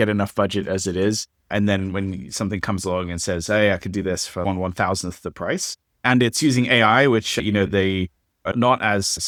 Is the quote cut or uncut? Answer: uncut